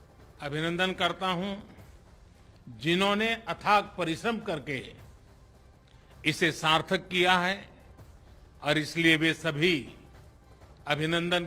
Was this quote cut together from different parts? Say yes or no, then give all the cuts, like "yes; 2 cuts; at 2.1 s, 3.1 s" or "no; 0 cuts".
no; 0 cuts